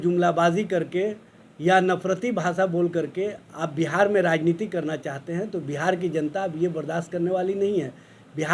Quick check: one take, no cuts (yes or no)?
yes